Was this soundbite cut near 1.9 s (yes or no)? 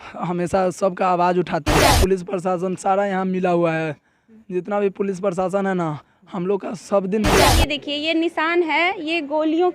yes